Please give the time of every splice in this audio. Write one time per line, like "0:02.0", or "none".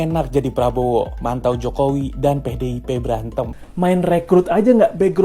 0:03.5

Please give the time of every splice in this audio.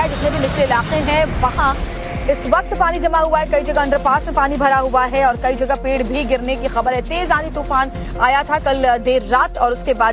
0:07.6

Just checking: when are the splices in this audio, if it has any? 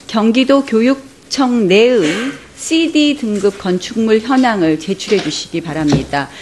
0:03.6

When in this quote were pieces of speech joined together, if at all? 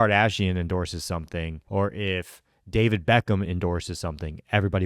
0:01.6

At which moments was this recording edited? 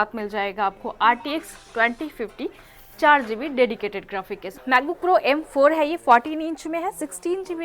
0:04.4

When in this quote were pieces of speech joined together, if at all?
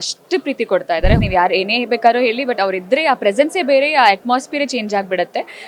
0:01.2

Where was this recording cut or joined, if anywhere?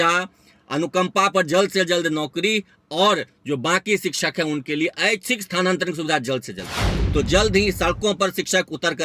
0:07.0

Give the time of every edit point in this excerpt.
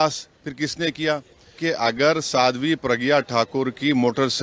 0:01.5

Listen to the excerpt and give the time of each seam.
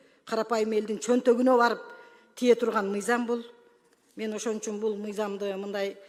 none

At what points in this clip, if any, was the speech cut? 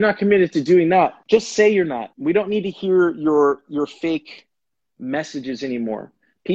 0:01.2
0:02.1

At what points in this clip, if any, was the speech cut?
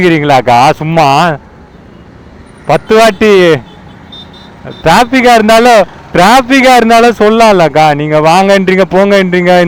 none

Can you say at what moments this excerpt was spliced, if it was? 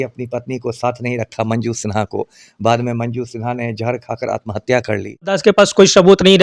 0:05.4

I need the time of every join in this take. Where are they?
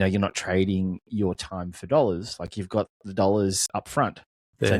0:03.6

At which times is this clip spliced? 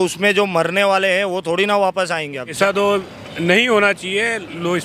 0:02.5

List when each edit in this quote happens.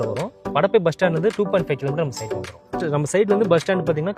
0:02.8

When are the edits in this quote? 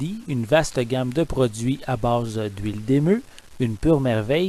none

